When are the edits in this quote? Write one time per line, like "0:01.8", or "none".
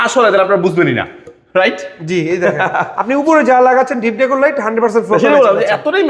none